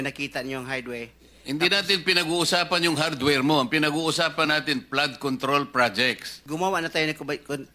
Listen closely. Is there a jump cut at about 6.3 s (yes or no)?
yes